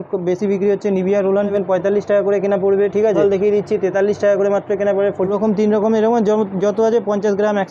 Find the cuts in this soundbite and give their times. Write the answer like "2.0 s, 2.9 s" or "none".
1.5 s, 3.2 s, 5.3 s